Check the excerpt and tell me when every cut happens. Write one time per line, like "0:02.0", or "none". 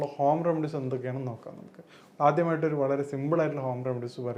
none